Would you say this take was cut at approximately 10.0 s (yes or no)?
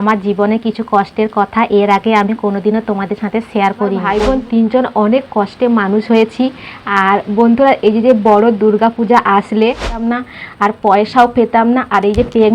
yes